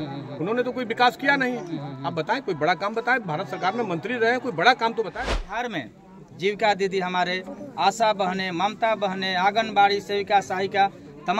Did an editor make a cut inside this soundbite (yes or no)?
yes